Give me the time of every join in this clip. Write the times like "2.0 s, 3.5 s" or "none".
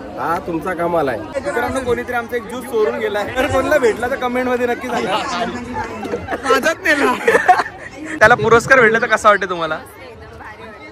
1.4 s, 3.4 s, 8.1 s